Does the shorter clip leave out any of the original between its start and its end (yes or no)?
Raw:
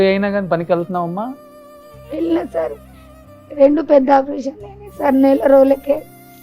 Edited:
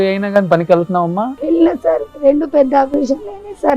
yes